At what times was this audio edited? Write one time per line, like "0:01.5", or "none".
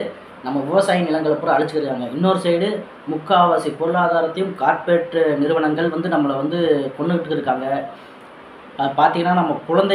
none